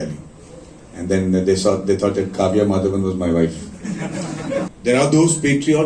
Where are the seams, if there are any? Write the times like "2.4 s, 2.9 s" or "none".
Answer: 4.7 s